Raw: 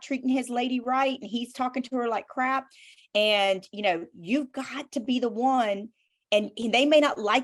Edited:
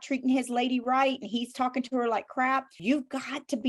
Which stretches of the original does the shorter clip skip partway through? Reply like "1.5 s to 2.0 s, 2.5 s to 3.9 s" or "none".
2.7 s to 4.2 s